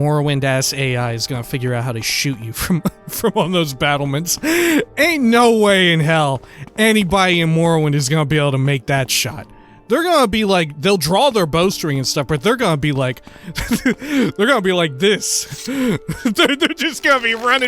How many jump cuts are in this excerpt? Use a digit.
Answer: 1